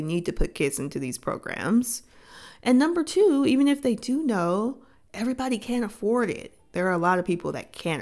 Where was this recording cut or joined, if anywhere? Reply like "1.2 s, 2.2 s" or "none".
6.5 s

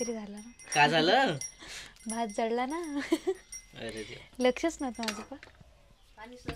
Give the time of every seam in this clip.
none

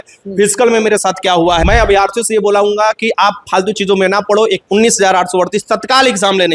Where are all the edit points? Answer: 1.5 s

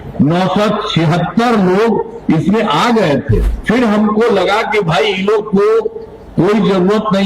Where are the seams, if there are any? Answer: 3.5 s

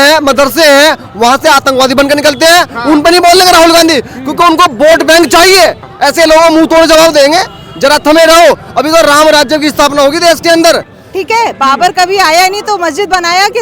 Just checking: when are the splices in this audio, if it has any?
5.9 s, 10.9 s

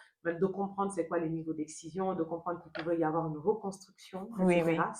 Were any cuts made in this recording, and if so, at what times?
none

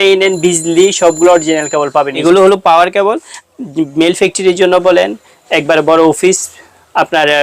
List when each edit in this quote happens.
2.1 s

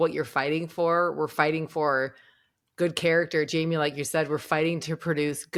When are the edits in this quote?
none

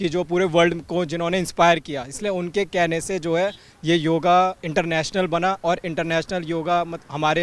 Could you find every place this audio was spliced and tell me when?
none

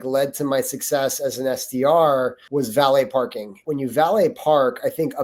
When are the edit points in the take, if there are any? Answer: 2.4 s, 3.5 s

